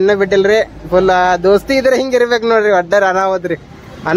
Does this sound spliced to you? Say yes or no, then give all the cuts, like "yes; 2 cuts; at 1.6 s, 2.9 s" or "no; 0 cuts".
no; 0 cuts